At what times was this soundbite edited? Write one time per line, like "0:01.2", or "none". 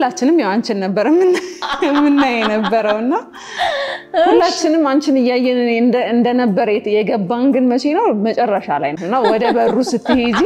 0:08.9